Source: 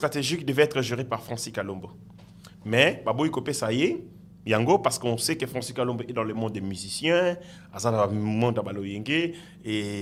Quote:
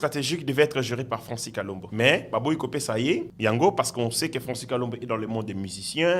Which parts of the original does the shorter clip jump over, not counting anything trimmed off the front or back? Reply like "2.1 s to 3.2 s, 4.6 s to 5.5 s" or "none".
1.8 s to 2.5 s, 4.0 s to 4.4 s